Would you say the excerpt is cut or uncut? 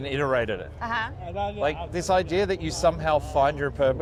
uncut